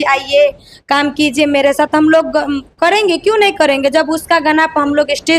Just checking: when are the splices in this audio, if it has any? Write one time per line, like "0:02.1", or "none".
none